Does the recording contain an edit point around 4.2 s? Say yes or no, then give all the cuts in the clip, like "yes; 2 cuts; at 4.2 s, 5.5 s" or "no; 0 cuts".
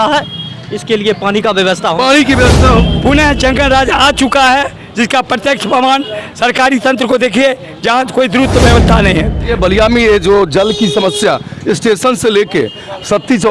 no; 2 cuts; at 2.8 s, 9.5 s